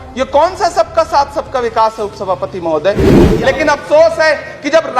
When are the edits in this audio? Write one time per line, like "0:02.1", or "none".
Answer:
0:03.2